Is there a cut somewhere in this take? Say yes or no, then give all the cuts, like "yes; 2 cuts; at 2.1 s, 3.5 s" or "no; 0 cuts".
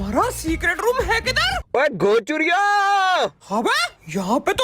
yes; 2 cuts; at 1.5 s, 3.4 s